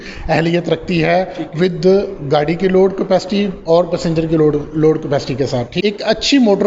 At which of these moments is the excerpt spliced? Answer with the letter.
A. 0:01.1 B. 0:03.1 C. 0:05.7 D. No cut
C